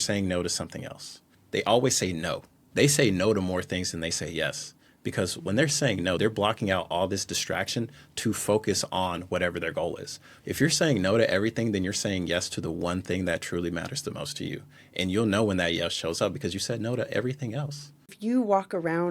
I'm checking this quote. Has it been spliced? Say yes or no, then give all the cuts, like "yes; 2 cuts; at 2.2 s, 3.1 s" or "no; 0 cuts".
yes; 3 cuts; at 1.3 s, 10.3 s, 18.2 s